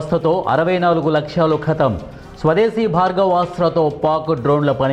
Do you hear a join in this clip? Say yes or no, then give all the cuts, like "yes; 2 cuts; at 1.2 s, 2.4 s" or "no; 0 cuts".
no; 0 cuts